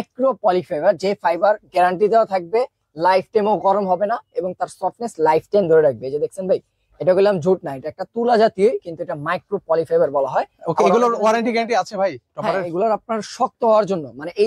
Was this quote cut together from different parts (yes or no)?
no